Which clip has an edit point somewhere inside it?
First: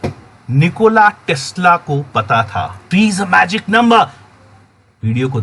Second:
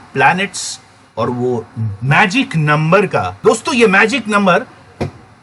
first; 1 cut; at 2.8 s

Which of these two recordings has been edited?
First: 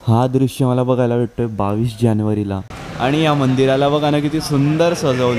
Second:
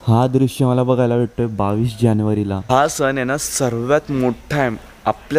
first; 1 cut; at 2.6 s

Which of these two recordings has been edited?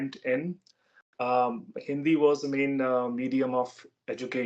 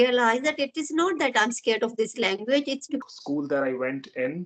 second; 1 cut; at 3.0 s

